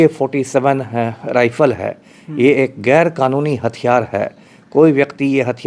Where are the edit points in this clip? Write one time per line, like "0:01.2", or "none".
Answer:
none